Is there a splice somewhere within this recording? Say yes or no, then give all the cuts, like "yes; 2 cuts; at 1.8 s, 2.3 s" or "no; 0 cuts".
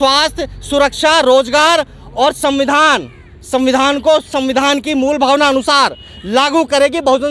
no; 0 cuts